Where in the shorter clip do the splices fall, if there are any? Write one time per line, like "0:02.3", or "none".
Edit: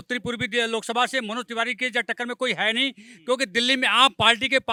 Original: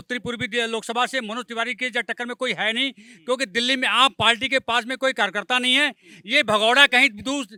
none